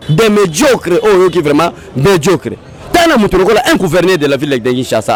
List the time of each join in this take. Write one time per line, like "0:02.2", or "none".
none

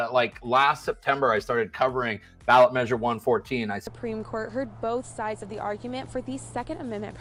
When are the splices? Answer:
none

